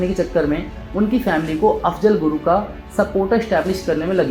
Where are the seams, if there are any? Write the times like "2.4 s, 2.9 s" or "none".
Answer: none